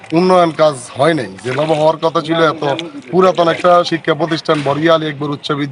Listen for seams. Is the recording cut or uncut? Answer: uncut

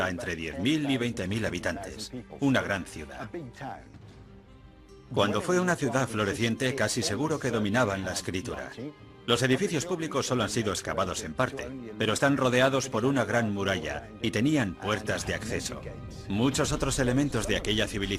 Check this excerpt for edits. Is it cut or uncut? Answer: cut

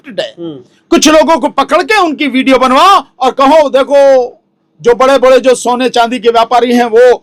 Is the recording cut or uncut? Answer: uncut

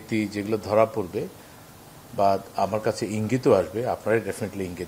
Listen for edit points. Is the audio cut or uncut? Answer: uncut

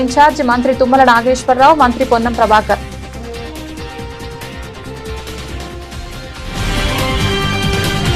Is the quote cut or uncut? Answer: cut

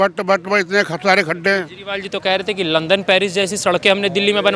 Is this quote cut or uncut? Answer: uncut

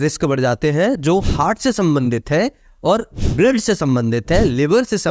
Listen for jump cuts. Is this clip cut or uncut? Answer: cut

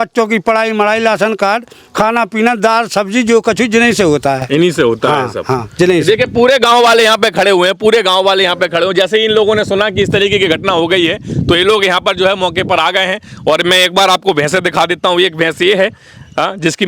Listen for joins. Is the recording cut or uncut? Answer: uncut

